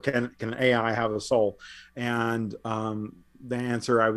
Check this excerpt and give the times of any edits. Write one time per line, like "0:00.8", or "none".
none